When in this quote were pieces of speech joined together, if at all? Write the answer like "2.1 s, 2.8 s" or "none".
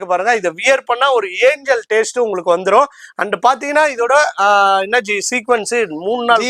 none